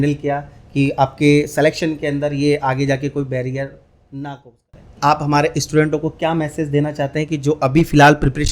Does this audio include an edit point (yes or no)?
yes